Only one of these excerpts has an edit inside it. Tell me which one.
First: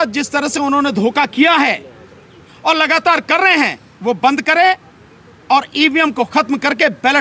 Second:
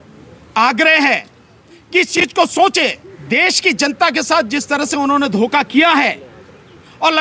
second; 1 cut; at 3.1 s

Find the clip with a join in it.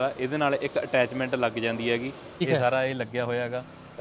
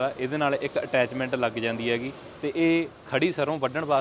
first; 1 cut; at 2.4 s

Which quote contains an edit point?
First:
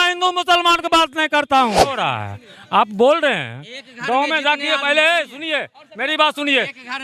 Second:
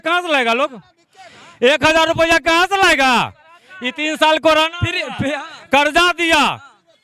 first; 1 cut; at 2.0 s

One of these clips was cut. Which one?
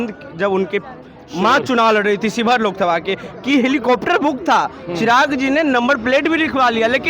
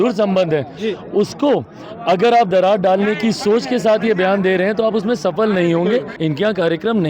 second; 1 cut; at 6.1 s

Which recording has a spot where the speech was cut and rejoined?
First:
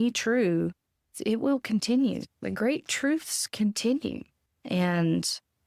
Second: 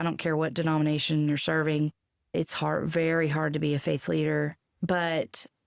second; 1 cut; at 4.7 s

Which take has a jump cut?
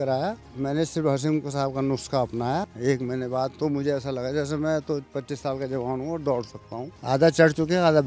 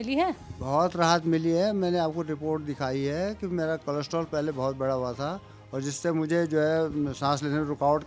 first; 2 cuts; at 2.7 s, 7.0 s

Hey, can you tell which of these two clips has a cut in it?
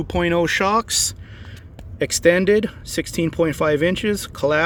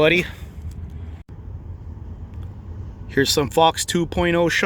second; 1 cut; at 1.2 s

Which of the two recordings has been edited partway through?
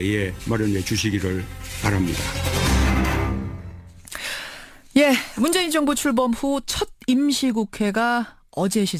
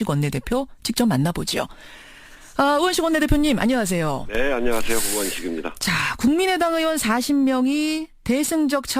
second; 1 cut; at 3.1 s

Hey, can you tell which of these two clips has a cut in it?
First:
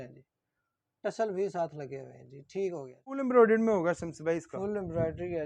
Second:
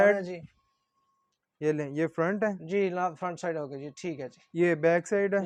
first; 1 cut; at 3.2 s

